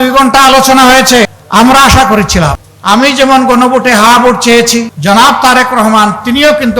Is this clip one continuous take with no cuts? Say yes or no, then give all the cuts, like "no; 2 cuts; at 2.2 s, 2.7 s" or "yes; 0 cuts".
no; 3 cuts; at 1.4 s, 2.7 s, 4.9 s